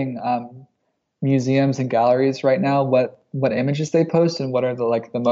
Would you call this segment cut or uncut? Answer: uncut